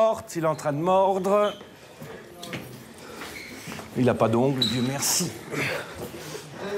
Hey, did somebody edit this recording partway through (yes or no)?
no